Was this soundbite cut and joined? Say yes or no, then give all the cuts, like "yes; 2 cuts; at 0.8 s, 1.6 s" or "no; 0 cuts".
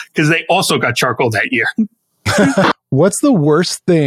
yes; 1 cut; at 2.7 s